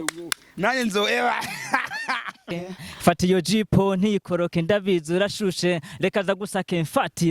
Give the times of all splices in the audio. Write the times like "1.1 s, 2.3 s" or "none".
2.4 s